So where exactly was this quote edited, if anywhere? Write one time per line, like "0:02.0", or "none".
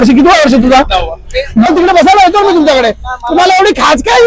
0:01.7

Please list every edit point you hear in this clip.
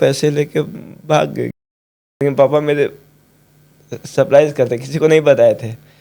0:02.2

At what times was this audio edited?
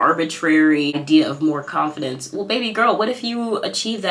0:01.0

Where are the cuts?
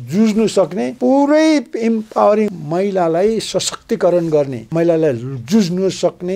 0:00.9
0:02.5
0:04.6

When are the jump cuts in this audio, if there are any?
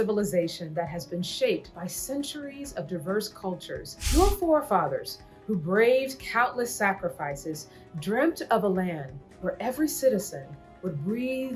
0:03.9

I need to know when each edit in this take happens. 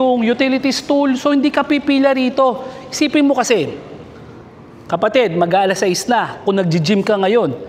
none

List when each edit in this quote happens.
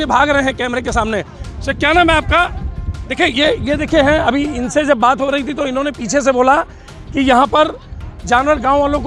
none

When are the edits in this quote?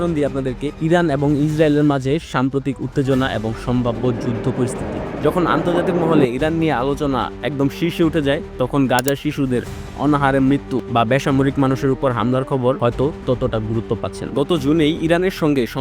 none

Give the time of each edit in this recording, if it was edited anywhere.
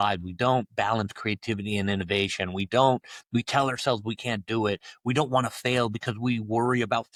none

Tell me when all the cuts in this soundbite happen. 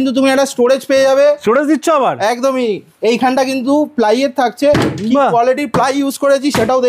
none

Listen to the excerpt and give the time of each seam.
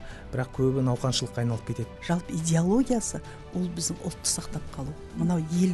0:01.8

